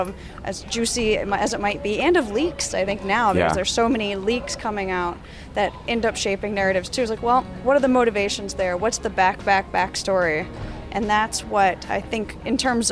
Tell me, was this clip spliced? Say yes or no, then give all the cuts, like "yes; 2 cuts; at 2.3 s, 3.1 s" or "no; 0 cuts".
yes; 1 cut; at 7.5 s